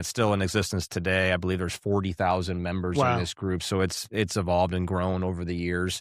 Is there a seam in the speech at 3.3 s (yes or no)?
no